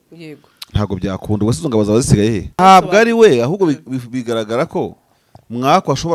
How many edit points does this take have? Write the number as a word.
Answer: one